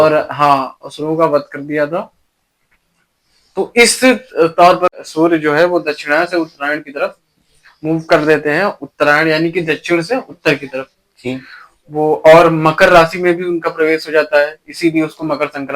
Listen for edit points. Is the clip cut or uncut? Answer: cut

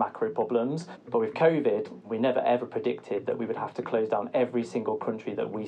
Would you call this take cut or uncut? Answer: cut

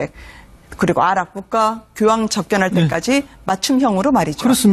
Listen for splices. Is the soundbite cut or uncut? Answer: cut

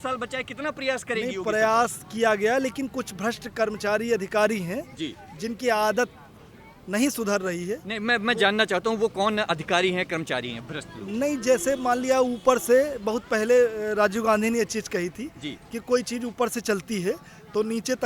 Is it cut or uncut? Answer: uncut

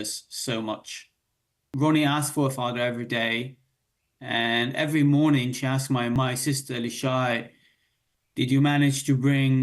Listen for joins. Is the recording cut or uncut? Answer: cut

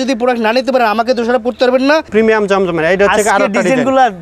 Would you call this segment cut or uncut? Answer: cut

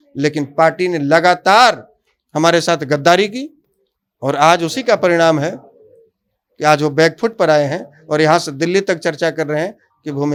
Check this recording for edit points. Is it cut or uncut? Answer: uncut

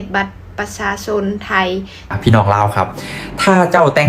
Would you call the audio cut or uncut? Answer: cut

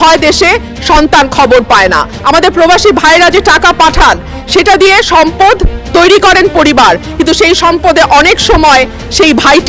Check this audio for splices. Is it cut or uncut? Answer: cut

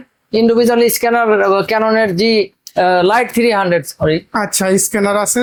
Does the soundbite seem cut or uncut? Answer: uncut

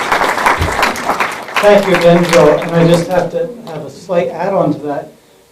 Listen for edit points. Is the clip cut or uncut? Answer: cut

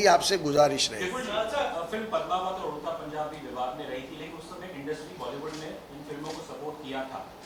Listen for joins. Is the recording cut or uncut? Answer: uncut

